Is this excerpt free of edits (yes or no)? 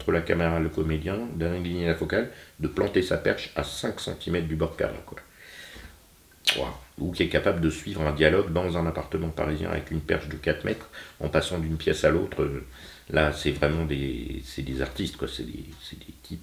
yes